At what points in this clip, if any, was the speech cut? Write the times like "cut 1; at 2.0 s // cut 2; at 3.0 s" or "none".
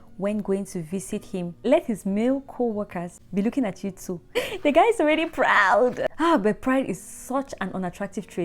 cut 1; at 1.6 s // cut 2; at 3.1 s // cut 3; at 4.4 s // cut 4; at 6.1 s